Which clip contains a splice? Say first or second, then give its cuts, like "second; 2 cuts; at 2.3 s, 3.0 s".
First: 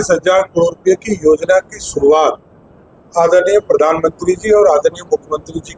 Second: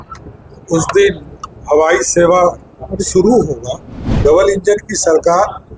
second; 1 cut; at 4.1 s